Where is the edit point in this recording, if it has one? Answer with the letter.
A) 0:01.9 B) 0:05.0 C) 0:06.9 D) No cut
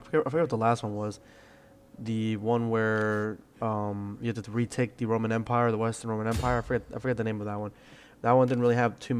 A